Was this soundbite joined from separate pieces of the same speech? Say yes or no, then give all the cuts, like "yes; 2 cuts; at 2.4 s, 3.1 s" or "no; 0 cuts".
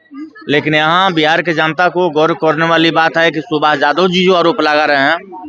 no; 0 cuts